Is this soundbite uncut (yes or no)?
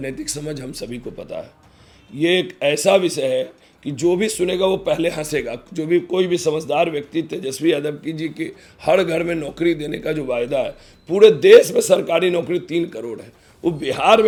yes